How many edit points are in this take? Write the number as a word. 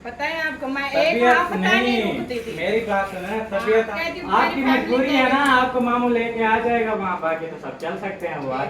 one